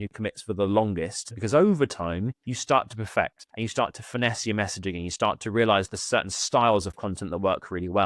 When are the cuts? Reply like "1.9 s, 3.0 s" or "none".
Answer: 1.4 s, 2.5 s, 3.4 s